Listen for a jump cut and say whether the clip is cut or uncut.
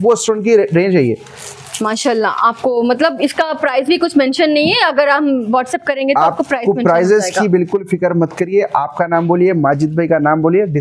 uncut